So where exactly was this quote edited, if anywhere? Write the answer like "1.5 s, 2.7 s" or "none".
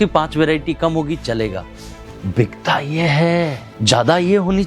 3.7 s